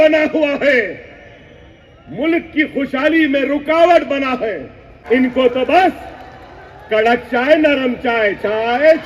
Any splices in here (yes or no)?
yes